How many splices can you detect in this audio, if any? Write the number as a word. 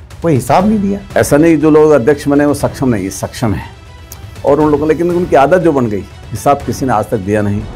one